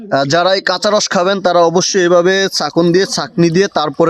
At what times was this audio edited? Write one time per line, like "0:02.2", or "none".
none